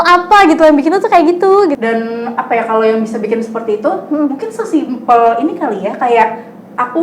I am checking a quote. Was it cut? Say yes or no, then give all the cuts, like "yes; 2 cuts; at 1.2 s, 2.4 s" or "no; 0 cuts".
yes; 1 cut; at 1.8 s